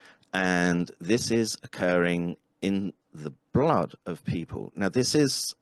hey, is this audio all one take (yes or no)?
yes